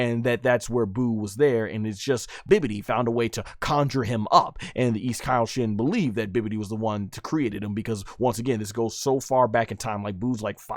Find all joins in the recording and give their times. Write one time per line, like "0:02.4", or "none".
0:02.4